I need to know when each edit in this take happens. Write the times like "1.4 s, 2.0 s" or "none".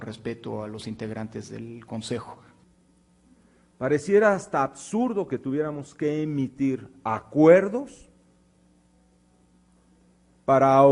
2.5 s